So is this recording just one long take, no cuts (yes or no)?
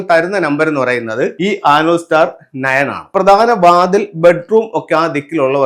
no